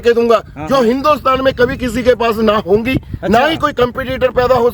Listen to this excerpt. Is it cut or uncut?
uncut